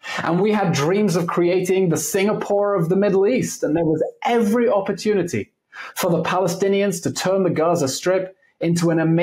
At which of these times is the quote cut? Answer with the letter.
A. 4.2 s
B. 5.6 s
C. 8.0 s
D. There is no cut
D